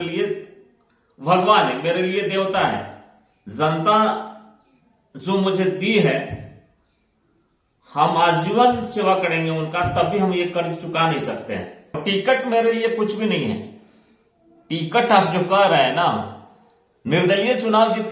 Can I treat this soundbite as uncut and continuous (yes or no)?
no